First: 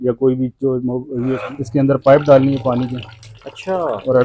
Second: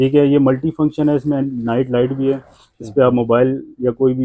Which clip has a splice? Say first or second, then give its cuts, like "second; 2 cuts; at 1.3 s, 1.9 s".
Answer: first; 1 cut; at 1.4 s